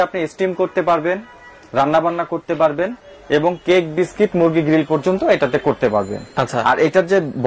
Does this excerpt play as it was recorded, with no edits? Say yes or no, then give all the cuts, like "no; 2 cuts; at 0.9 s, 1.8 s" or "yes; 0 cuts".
yes; 0 cuts